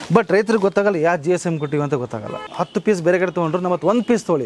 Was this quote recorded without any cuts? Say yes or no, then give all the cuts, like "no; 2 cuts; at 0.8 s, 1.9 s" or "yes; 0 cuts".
no; 1 cut; at 2.5 s